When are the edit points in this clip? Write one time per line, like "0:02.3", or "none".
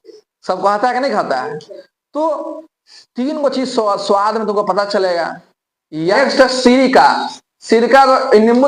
0:06.1